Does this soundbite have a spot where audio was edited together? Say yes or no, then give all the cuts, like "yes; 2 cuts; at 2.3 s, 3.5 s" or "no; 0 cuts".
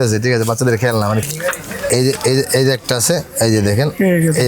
yes; 1 cut; at 1.3 s